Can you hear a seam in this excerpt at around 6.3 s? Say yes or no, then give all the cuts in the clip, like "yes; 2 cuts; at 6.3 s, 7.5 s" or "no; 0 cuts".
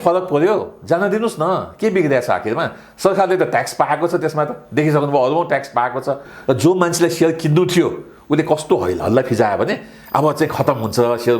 yes; 1 cut; at 6.3 s